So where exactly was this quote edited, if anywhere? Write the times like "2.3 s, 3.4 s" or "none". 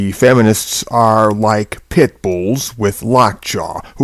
none